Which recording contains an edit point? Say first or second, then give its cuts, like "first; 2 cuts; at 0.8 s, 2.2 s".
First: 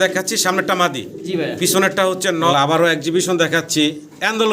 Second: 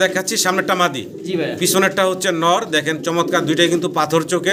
first; 1 cut; at 2.5 s